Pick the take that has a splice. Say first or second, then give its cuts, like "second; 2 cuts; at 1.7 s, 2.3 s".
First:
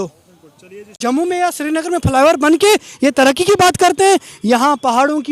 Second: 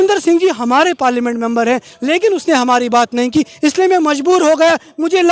first; 1 cut; at 1.0 s